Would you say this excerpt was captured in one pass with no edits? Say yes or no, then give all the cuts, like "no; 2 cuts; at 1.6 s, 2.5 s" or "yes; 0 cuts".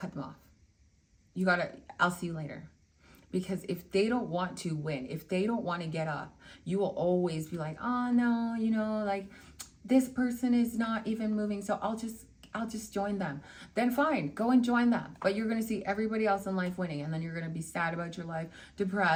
yes; 0 cuts